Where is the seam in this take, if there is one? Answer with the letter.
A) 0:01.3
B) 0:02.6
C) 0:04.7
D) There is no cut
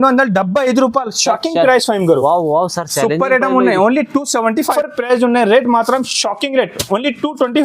C